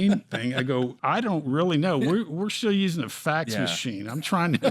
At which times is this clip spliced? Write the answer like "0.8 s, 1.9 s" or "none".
1.0 s